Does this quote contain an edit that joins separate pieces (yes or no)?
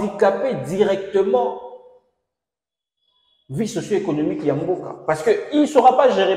no